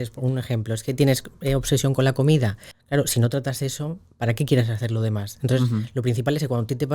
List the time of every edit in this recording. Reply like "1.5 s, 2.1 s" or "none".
2.7 s